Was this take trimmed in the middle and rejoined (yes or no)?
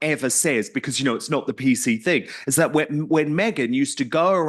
no